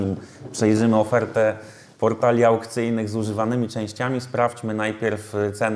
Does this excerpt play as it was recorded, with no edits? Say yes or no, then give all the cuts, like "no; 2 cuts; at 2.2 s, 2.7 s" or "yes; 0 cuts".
yes; 0 cuts